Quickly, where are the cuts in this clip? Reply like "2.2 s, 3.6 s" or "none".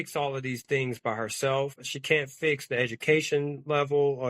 1.9 s